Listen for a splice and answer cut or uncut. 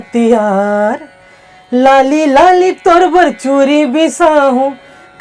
uncut